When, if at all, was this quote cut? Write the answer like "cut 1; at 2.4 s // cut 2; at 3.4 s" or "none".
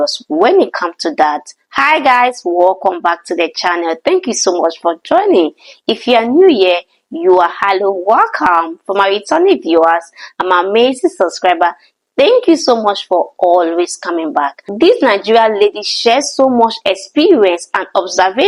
none

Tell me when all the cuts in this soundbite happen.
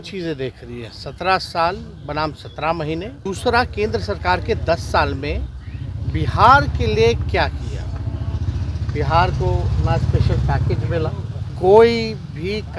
cut 1; at 3.2 s // cut 2; at 11.4 s

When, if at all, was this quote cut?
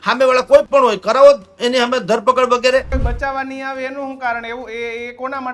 cut 1; at 3.0 s

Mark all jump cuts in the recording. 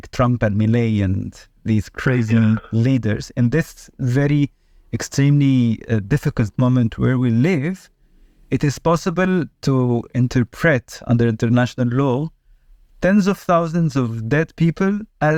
none

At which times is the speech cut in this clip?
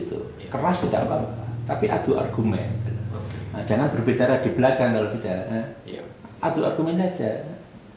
none

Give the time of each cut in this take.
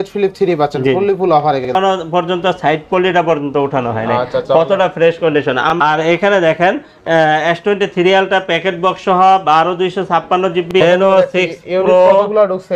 cut 1; at 1.7 s // cut 2; at 5.7 s // cut 3; at 10.8 s

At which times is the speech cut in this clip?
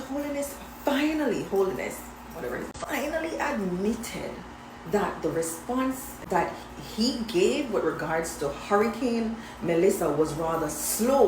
cut 1; at 2.8 s // cut 2; at 6.2 s

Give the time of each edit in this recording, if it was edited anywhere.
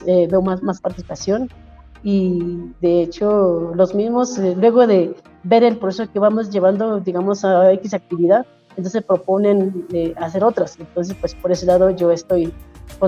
none

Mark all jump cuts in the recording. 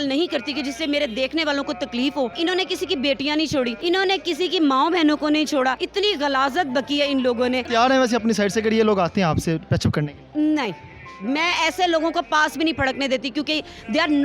cut 1; at 2.3 s // cut 2; at 3.8 s // cut 3; at 5.8 s // cut 4; at 7.7 s

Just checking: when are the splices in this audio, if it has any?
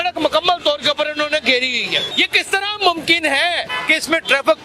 cut 1; at 2.1 s // cut 2; at 3.7 s

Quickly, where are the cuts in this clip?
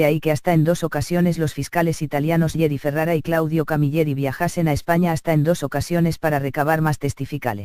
cut 1; at 3.5 s

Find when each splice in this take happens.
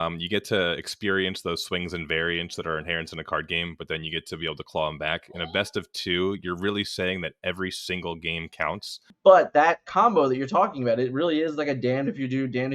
cut 1; at 9.1 s

